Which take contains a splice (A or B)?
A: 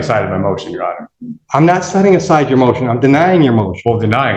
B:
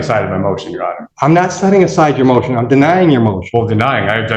B